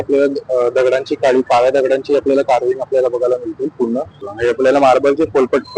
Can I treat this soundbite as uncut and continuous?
no; 1 cut; at 4.3 s

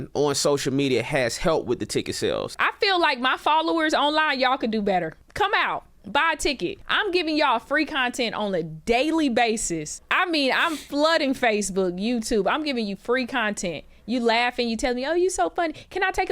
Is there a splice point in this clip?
yes; 4 cuts; at 2.5 s, 5.2 s, 6.9 s, 10.0 s

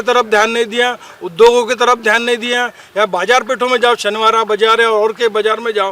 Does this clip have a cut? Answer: no; 0 cuts

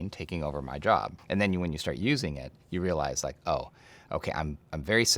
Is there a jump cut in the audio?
yes; 1 cut; at 1.2 s

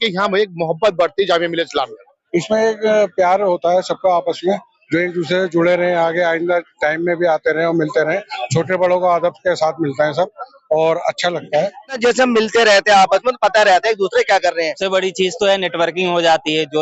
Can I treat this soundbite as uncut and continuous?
no; 3 cuts; at 2.1 s, 12.0 s, 14.7 s

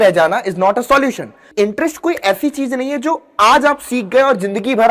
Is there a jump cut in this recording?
yes; 1 cut; at 1.5 s

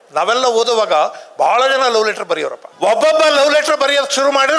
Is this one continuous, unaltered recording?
no; 1 cut; at 2.6 s

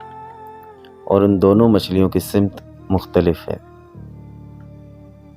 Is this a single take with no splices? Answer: no; 1 cut; at 3.6 s

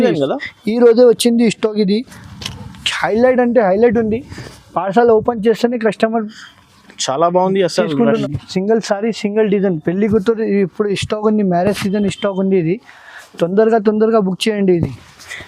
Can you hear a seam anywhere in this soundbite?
yes; 1 cut; at 8.2 s

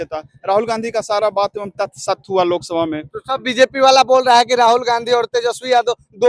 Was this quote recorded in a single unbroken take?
yes; 0 cuts

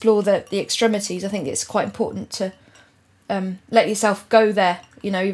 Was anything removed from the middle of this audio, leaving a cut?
no; 0 cuts

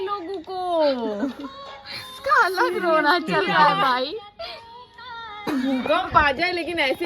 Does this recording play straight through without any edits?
no; 1 cut; at 5.5 s

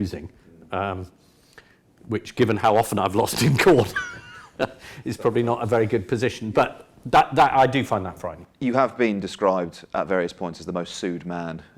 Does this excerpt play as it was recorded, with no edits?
yes; 0 cuts

